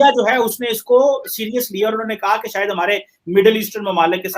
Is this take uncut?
no; 1 cut; at 2.1 s

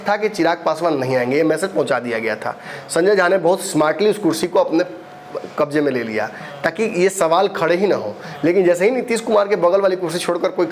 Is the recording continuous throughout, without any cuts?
yes; 0 cuts

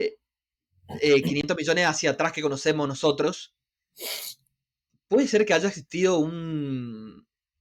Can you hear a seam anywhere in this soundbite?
no; 0 cuts

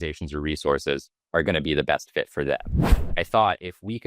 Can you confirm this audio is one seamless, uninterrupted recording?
no; 2 cuts; at 1.1 s, 2.7 s

